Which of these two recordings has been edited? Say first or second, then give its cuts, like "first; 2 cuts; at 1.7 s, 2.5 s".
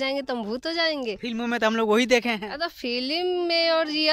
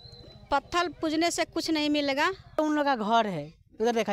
second; 1 cut; at 2.6 s